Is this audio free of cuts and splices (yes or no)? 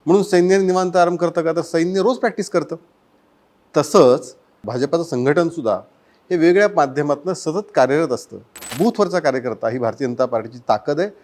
no